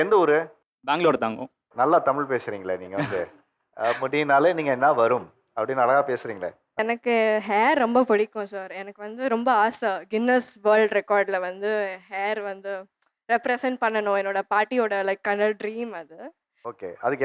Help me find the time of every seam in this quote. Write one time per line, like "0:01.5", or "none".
0:06.8